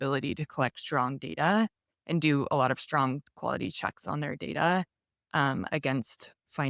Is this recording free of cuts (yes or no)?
no